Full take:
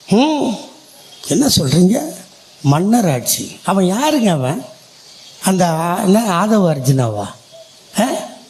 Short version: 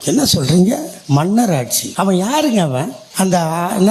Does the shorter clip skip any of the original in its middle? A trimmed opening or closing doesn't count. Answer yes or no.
yes